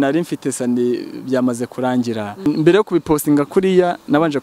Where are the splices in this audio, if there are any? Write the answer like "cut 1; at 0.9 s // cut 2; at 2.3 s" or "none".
cut 1; at 2.5 s

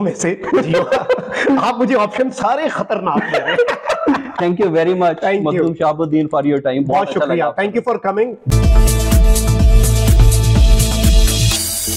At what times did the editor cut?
cut 1; at 8.4 s

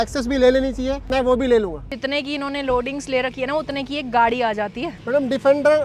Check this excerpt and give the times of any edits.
cut 1; at 1.1 s // cut 2; at 1.9 s // cut 3; at 4.9 s

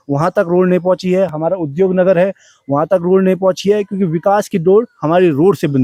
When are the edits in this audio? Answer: none

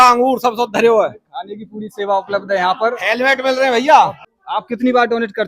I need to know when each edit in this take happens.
cut 1; at 4.3 s

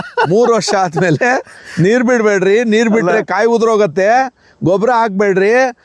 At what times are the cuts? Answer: none

